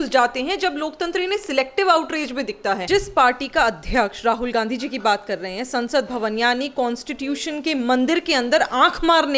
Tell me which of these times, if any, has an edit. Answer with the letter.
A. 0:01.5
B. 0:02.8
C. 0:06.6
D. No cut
B